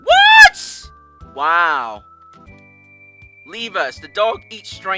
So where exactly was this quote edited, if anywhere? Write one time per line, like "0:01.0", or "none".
0:02.4